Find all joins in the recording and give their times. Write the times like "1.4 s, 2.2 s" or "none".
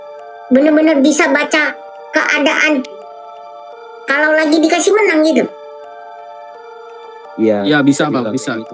5.5 s, 7.3 s

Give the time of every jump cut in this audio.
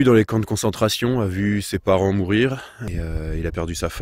2.9 s

